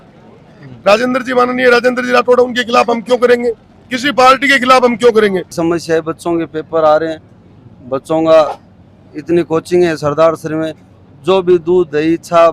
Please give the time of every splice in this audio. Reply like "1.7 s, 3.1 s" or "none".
5.5 s